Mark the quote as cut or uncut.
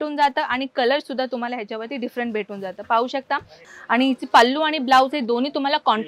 cut